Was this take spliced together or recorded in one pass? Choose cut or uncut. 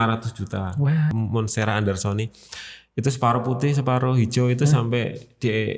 cut